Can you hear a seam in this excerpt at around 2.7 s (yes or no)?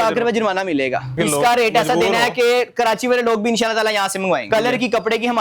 no